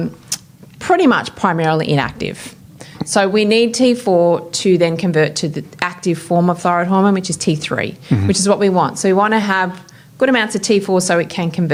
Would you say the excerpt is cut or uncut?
uncut